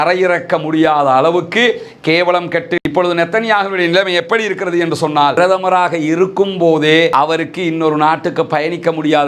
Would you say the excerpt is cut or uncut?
cut